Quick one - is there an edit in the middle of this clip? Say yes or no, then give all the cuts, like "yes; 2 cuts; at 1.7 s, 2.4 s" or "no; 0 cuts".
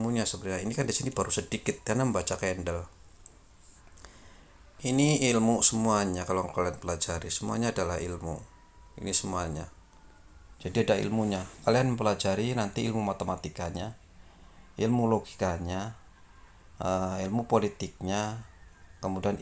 yes; 1 cut; at 10.4 s